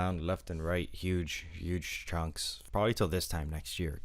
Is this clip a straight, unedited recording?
no; 1 cut; at 2.5 s

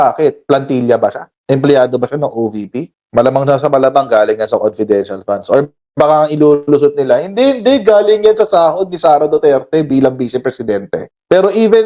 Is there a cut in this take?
no; 0 cuts

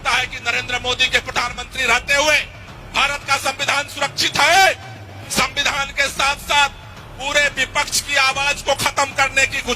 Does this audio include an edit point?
yes; 1 cut; at 5.1 s

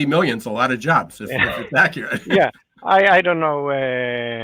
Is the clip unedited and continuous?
yes; 0 cuts

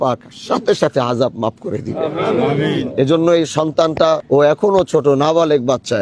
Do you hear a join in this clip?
yes; 1 cut; at 4.2 s

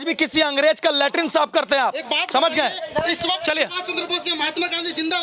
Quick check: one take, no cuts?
yes; 0 cuts

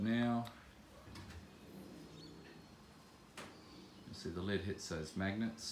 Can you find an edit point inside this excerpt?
yes; 1 cut; at 1.1 s

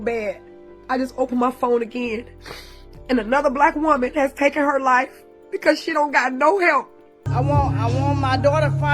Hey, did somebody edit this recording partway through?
yes; 1 cut; at 7.2 s

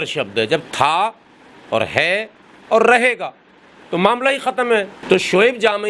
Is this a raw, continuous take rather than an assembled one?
no; 1 cut; at 4.9 s

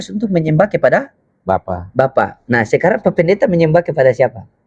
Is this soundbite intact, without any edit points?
yes; 0 cuts

